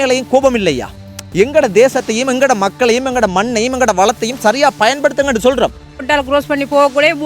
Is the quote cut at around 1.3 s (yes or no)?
no